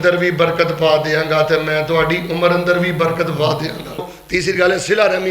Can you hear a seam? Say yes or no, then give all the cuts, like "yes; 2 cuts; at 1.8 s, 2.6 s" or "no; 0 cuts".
yes; 1 cut; at 4.2 s